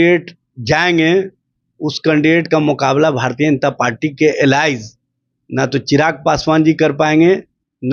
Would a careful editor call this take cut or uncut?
uncut